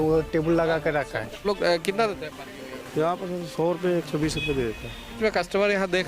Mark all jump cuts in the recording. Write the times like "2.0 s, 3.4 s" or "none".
1.2 s, 5.2 s